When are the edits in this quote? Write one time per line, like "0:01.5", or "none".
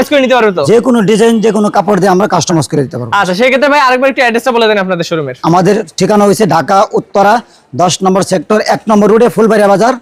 none